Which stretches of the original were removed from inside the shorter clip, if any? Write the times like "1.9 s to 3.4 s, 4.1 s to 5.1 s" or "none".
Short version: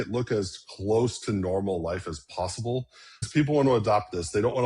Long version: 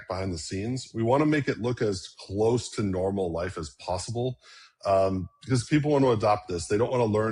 4.8 s to 5.6 s